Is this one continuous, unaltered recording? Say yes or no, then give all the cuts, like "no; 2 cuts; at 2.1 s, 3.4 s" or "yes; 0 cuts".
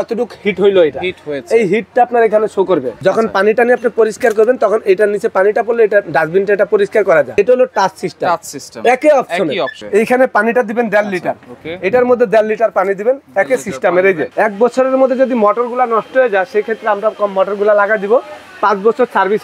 no; 4 cuts; at 2.9 s, 7.4 s, 9.8 s, 14.3 s